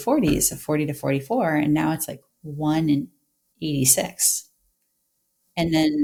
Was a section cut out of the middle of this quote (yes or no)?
no